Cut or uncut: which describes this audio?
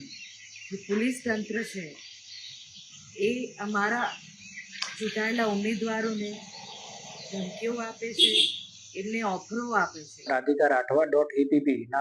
cut